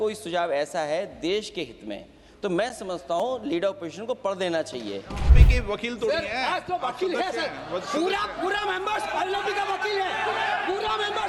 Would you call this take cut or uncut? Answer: cut